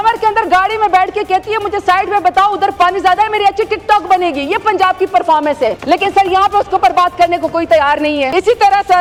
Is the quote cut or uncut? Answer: uncut